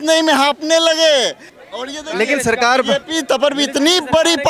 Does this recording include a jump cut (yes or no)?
yes